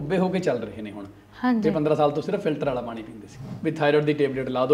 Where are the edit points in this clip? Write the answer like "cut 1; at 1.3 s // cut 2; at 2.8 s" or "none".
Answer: cut 1; at 3.5 s

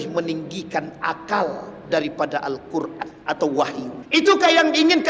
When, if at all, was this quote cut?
cut 1; at 3.1 s // cut 2; at 4.0 s

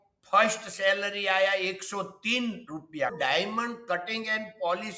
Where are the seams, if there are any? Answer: cut 1; at 3.1 s

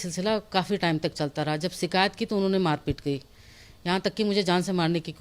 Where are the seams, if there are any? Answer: none

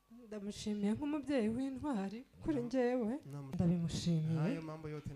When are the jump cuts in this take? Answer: cut 1; at 3.5 s

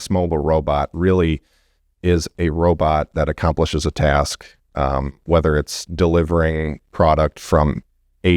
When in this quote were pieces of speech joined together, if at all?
none

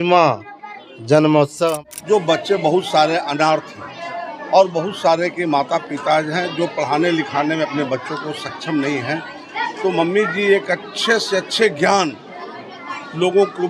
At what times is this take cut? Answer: cut 1; at 1.7 s

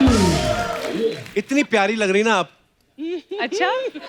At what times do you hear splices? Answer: cut 1; at 1.2 s

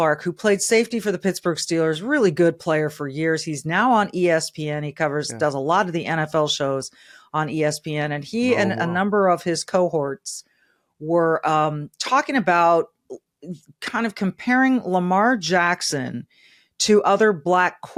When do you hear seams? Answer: none

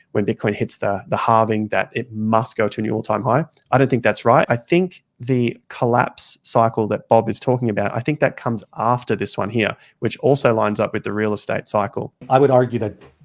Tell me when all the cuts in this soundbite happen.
cut 1; at 12.2 s

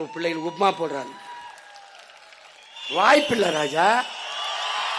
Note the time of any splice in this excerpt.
cut 1; at 2.8 s

